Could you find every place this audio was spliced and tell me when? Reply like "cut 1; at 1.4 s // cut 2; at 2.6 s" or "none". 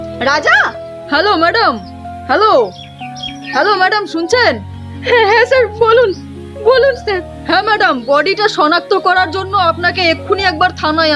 none